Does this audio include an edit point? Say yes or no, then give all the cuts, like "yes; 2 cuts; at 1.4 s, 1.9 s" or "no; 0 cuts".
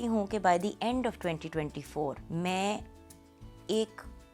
yes; 1 cut; at 2.2 s